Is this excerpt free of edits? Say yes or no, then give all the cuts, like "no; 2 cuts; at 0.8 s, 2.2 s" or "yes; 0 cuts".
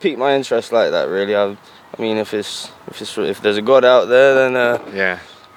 yes; 0 cuts